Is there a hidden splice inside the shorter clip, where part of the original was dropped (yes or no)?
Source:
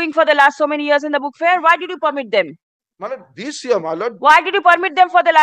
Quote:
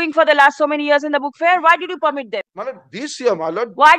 yes